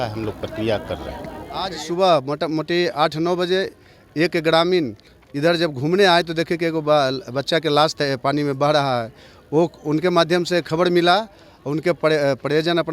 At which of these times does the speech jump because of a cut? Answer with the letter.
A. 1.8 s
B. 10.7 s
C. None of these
A